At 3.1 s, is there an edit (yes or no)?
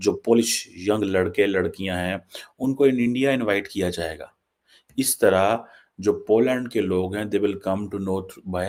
no